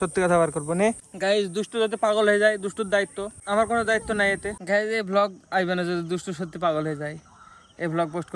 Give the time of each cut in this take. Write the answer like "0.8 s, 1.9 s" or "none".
1.0 s, 4.5 s